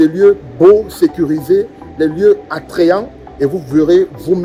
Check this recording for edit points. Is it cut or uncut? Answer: uncut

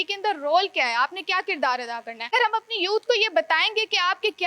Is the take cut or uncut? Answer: cut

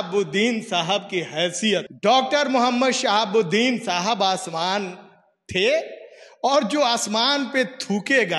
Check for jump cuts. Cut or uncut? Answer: cut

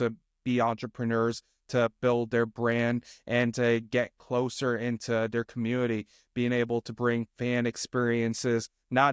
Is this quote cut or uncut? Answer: uncut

